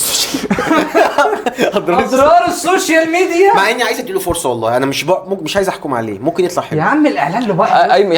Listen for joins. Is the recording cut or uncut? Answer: uncut